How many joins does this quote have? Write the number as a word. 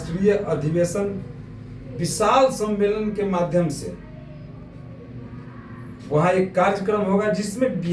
zero